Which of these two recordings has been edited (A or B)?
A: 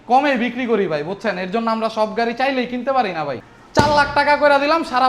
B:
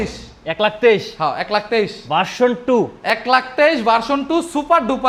A